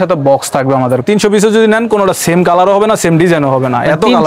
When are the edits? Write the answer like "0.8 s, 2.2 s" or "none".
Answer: 1.0 s